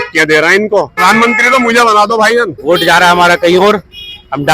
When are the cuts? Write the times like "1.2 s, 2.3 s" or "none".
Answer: 1.0 s, 2.6 s